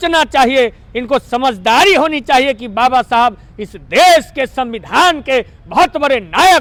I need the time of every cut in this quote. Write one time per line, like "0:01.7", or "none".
none